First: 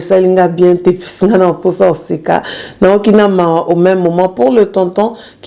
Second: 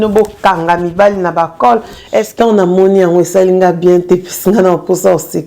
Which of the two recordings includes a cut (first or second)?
second